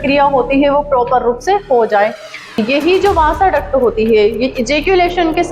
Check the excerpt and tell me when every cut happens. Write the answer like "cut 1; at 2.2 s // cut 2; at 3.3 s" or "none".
cut 1; at 2.6 s